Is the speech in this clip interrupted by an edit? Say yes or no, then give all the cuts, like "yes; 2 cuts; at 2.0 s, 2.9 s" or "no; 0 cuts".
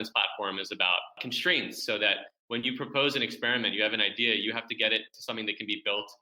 yes; 1 cut; at 1.2 s